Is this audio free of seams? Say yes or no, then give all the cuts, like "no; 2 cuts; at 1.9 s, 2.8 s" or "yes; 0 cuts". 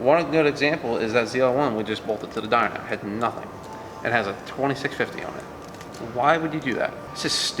yes; 0 cuts